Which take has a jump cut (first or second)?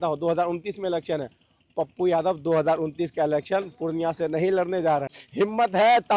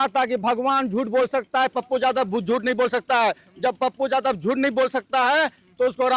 first